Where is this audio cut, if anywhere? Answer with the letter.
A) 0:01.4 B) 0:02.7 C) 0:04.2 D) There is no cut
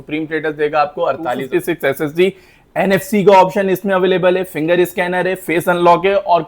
A